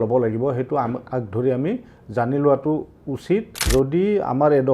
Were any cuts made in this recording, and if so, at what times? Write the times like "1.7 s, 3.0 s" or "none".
3.7 s